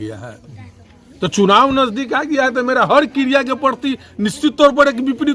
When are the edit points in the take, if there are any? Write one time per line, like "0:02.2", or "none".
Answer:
none